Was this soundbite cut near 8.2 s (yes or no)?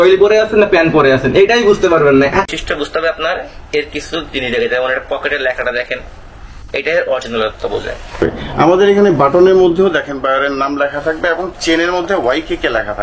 yes